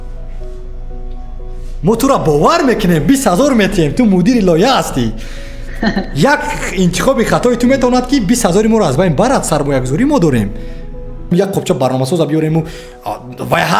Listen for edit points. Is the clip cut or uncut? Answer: cut